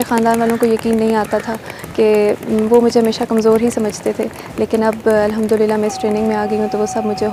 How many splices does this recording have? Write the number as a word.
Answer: zero